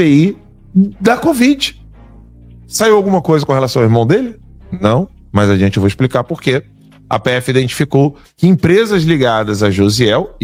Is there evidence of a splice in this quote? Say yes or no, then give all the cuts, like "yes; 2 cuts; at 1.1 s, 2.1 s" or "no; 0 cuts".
no; 0 cuts